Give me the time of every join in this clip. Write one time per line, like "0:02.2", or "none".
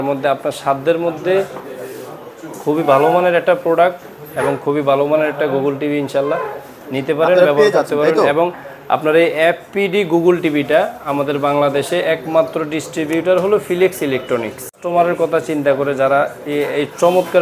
none